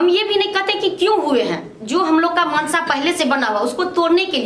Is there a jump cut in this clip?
no; 0 cuts

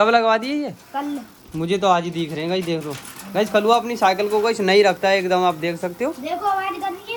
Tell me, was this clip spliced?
no; 0 cuts

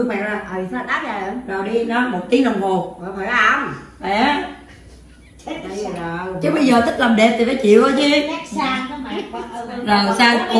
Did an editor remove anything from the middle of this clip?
no; 0 cuts

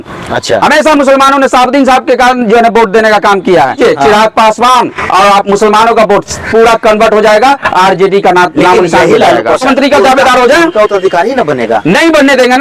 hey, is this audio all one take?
no; 2 cuts; at 3.8 s, 9.6 s

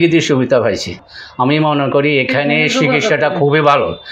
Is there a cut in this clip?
yes; 1 cut; at 1.0 s

